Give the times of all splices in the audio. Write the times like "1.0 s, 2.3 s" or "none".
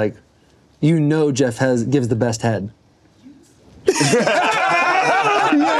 none